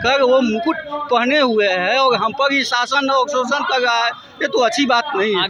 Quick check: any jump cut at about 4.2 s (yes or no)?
no